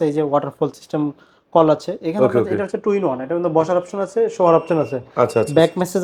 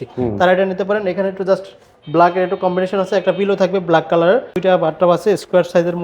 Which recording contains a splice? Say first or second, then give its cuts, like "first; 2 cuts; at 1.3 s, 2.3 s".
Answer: second; 1 cut; at 4.5 s